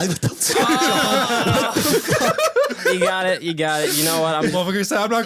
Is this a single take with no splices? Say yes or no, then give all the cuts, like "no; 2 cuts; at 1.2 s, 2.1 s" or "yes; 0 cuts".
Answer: no; 2 cuts; at 2.8 s, 4.5 s